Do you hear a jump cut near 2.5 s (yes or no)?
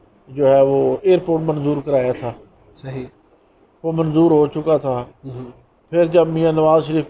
no